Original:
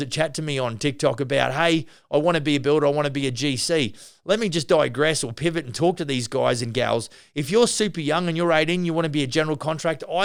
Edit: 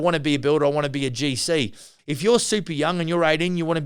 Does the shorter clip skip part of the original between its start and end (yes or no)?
yes